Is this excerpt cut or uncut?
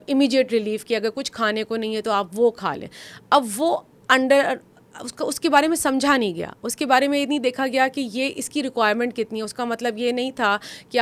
uncut